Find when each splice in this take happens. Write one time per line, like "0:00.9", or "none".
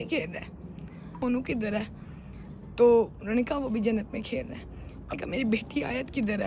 0:01.1
0:05.1